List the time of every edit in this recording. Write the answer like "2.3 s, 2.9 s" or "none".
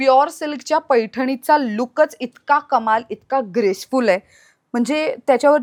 none